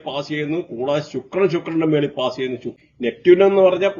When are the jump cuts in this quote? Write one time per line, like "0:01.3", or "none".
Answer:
0:02.7

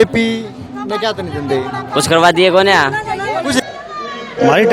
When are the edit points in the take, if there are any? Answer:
0:03.6

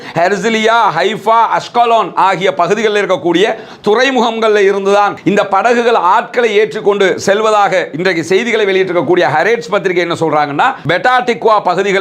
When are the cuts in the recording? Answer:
0:10.8

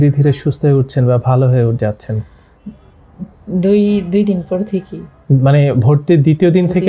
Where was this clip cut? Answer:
none

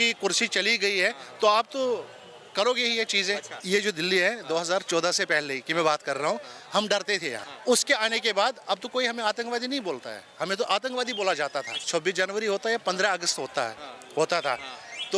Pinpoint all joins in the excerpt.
0:03.5
0:07.5
0:11.8

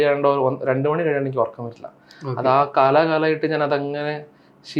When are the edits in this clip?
none

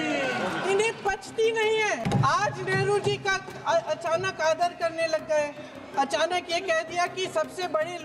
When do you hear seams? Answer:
0:02.0

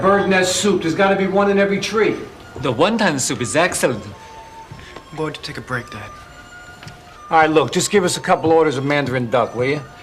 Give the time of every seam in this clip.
none

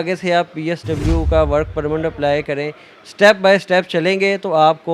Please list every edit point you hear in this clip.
none

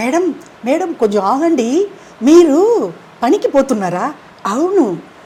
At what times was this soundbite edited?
none

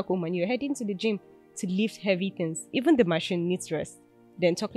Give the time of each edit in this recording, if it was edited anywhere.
0:02.7

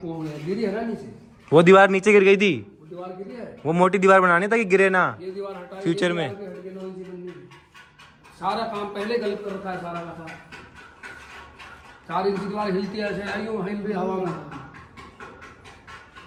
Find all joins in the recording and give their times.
none

